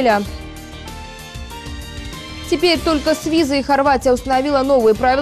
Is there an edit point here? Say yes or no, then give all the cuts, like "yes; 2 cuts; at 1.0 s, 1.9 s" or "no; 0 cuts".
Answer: no; 0 cuts